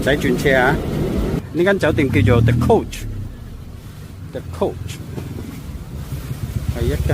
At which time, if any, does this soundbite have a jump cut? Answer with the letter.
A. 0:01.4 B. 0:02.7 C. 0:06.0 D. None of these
A